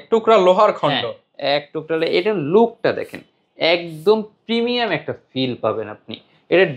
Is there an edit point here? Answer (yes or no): no